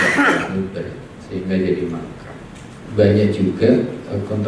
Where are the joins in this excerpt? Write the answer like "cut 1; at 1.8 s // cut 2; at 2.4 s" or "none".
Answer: cut 1; at 2.8 s